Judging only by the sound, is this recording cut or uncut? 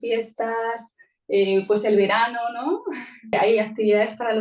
cut